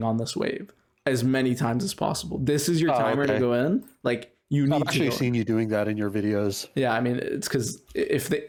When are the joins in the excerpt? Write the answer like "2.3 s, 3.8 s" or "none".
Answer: none

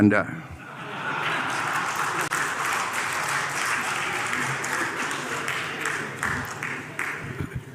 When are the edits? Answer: none

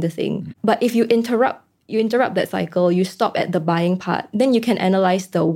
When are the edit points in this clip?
none

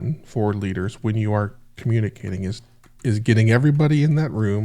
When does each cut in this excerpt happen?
none

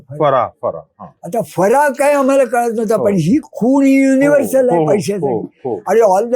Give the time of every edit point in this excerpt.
none

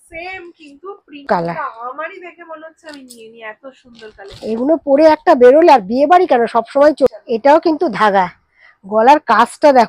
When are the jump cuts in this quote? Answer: 1.3 s, 7.2 s

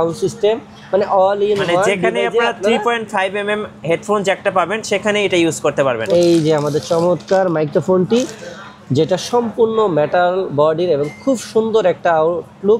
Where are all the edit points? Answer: 6.0 s

